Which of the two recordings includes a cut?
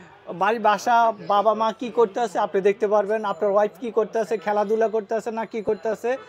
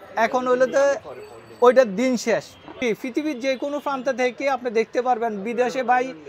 second; 1 cut; at 2.7 s

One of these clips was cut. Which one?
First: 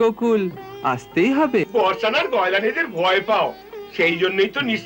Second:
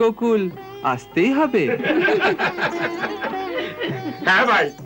first; 1 cut; at 1.6 s

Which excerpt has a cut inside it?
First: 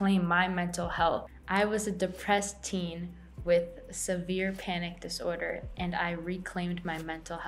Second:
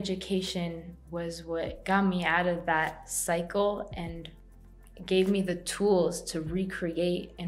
first; 1 cut; at 1.3 s

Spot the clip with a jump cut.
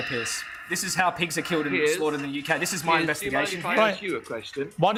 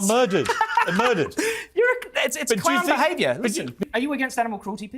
second; 1 cut; at 3.8 s

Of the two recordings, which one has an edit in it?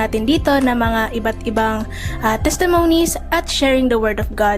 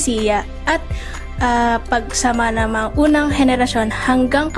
second; 1 cut; at 2.3 s

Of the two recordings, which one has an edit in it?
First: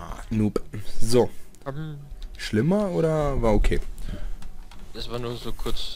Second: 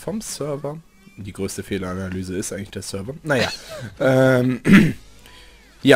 second; 1 cut; at 1.2 s

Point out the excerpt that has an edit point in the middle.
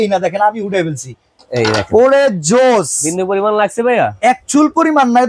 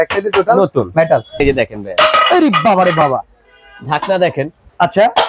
second; 1 cut; at 1.4 s

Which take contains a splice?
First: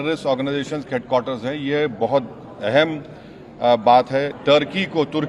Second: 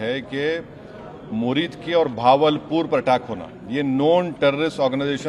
first; 1 cut; at 4.3 s

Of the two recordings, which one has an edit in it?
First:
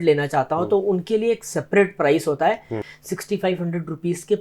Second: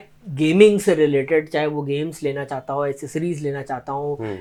first; 1 cut; at 2.8 s

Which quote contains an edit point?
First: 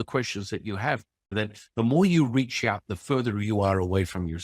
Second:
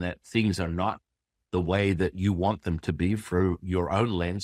first; 1 cut; at 1.3 s

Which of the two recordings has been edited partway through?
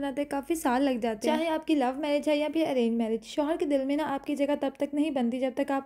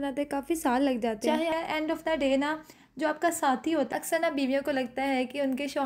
second; 2 cuts; at 1.5 s, 3.9 s

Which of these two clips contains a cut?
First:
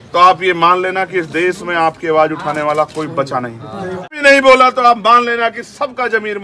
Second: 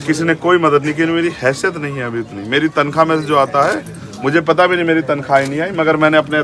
first; 1 cut; at 4.1 s

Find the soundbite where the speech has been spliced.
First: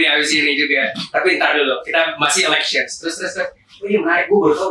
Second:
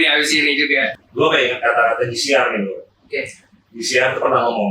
second; 1 cut; at 1.0 s

